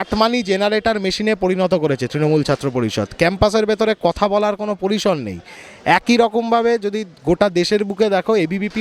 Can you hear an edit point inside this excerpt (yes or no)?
no